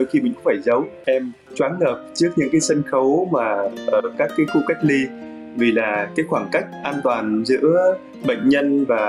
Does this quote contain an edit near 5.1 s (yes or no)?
no